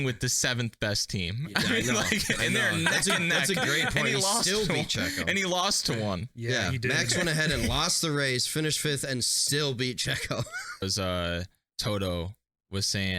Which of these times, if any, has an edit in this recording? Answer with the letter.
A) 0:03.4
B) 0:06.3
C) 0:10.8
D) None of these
C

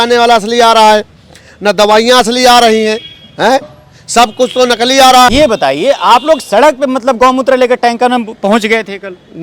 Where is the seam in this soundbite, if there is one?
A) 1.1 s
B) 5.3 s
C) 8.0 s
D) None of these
B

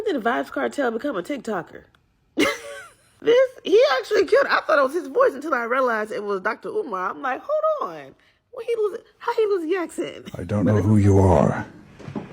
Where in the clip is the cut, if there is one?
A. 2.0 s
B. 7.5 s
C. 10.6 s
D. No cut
C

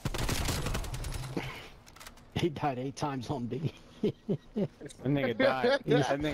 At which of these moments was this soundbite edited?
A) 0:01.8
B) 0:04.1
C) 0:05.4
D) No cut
D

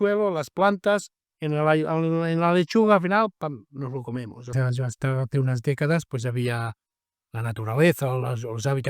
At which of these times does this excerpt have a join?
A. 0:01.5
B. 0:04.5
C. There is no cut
B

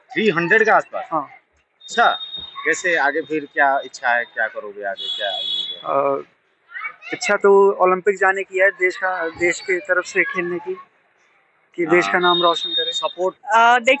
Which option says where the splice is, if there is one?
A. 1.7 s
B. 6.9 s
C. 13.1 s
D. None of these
C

